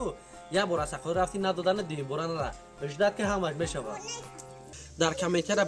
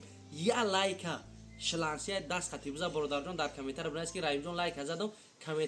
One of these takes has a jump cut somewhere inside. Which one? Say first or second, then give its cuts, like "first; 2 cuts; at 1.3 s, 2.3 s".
first; 1 cut; at 4.8 s